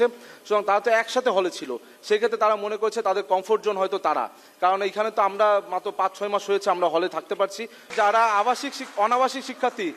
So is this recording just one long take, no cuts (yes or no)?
no